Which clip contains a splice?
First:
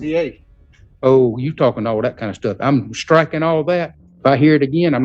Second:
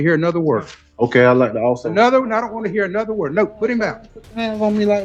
first; 1 cut; at 4.0 s

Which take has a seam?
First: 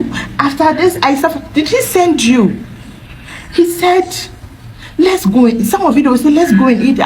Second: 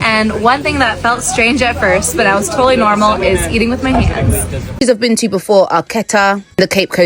second; 1 cut; at 4.7 s

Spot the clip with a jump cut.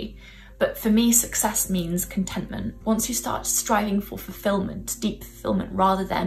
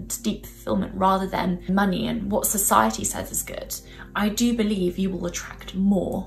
first; 1 cut; at 2.7 s

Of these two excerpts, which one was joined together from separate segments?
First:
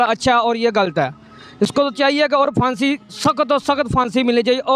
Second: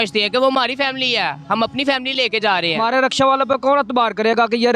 second; 1 cut; at 2.8 s

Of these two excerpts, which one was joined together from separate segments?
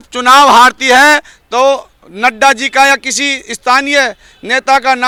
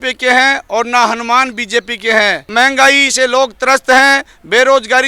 second; 1 cut; at 2.4 s

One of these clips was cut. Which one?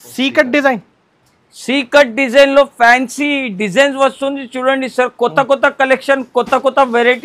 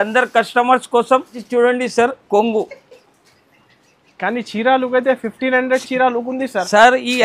second; 1 cut; at 1.4 s

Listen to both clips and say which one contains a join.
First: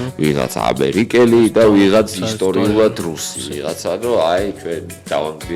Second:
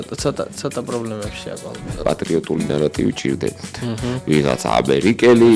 second; 1 cut; at 2.0 s

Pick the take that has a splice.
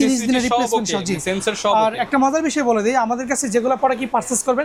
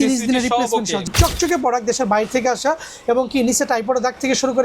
second; 1 cut; at 1.1 s

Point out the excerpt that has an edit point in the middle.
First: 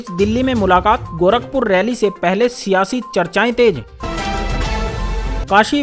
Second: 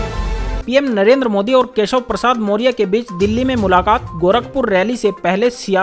first; 1 cut; at 3.8 s

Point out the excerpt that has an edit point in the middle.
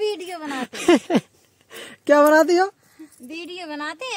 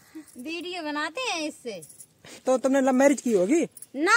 second; 1 cut; at 2.3 s

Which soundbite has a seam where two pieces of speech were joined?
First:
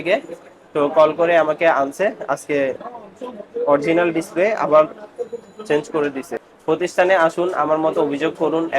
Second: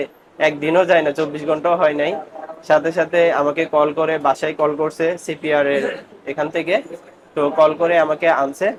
first; 1 cut; at 6.4 s

